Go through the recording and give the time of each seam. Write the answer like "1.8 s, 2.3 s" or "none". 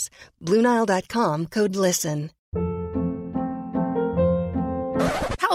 2.3 s